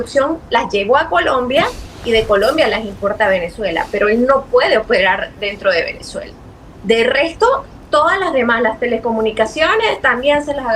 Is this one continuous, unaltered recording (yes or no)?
yes